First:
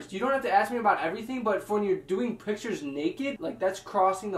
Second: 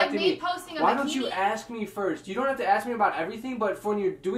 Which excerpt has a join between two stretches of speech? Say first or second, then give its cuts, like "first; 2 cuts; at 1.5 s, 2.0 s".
first; 1 cut; at 3.3 s